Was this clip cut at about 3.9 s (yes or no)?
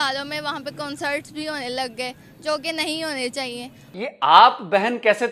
yes